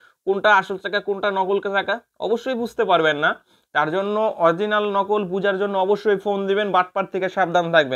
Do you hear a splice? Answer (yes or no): no